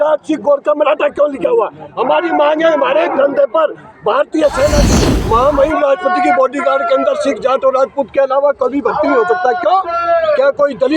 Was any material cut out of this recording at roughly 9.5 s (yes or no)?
no